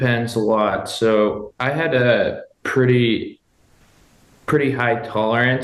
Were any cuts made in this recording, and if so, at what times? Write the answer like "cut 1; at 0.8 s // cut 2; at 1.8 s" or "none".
none

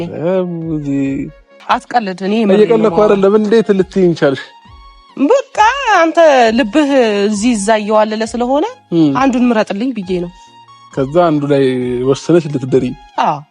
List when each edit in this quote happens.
cut 1; at 1.5 s

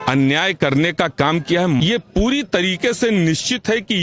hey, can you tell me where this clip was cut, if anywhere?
cut 1; at 1.8 s

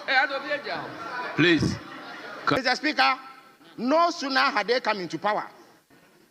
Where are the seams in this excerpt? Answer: cut 1; at 2.6 s

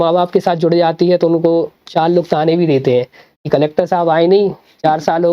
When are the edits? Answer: none

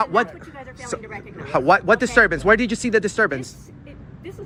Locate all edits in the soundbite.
none

